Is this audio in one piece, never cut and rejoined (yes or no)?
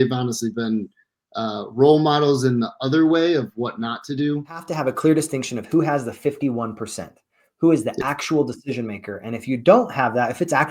no